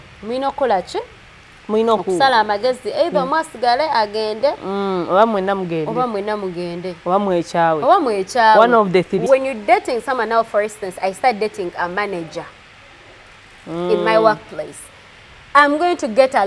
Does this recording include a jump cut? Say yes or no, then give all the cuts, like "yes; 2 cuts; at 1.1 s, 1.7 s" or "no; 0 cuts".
yes; 1 cut; at 9.2 s